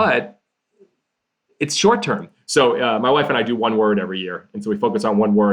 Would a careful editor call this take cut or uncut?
cut